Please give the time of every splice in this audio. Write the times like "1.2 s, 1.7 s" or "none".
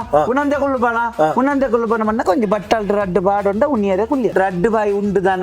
4.3 s